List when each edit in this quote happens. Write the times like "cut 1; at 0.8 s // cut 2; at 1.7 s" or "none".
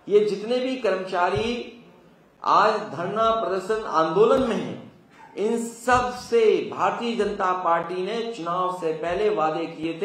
none